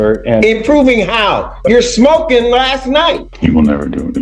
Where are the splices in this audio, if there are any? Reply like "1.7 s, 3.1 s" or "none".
3.3 s